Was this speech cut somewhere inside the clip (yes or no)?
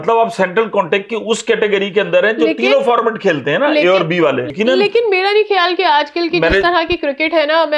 yes